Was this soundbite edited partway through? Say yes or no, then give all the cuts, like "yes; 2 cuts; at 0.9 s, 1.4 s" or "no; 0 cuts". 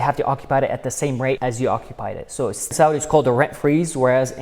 yes; 2 cuts; at 1.4 s, 2.7 s